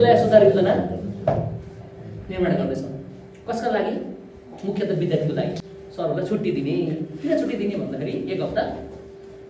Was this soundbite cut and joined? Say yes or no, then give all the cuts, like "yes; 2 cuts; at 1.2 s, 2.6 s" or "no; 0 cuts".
yes; 1 cut; at 5.7 s